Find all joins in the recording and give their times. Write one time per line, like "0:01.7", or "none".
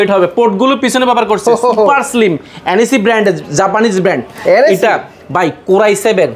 none